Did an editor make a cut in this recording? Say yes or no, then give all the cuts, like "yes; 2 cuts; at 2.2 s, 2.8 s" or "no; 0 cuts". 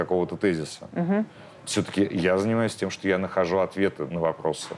no; 0 cuts